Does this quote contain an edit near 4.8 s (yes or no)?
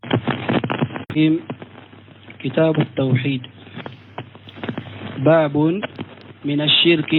no